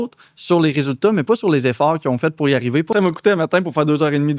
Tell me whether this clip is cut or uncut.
cut